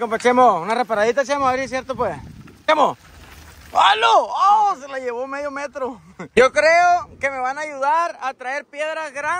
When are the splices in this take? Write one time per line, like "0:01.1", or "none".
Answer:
0:02.6
0:06.2